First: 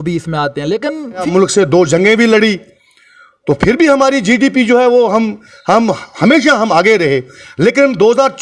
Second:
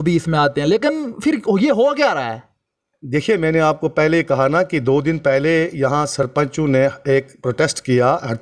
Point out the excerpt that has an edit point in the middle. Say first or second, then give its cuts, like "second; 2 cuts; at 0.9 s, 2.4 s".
first; 1 cut; at 1.3 s